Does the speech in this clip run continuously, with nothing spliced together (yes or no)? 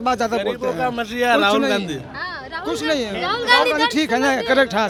yes